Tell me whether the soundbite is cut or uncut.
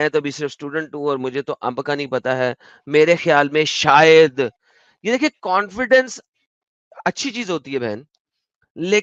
uncut